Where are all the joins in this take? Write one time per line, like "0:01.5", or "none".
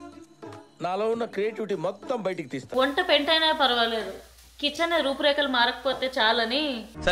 0:02.6